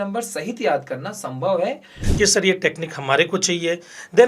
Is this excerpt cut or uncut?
cut